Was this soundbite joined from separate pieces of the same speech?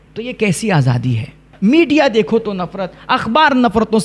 yes; 1 cut; at 1.4 s

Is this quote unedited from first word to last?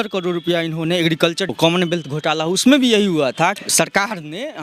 no; 2 cuts; at 1.5 s, 3.6 s

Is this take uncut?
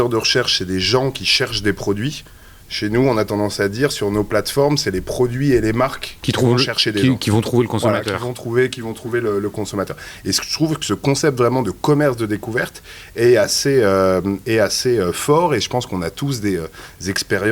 yes; 0 cuts

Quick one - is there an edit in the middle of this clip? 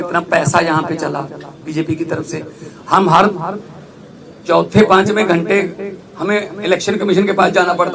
no; 0 cuts

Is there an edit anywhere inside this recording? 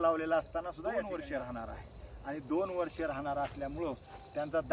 yes; 1 cut; at 1.1 s

